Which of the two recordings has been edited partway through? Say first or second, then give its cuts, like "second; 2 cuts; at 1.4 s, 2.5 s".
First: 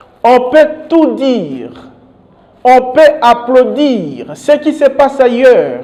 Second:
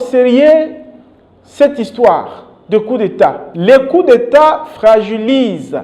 second; 1 cut; at 3.5 s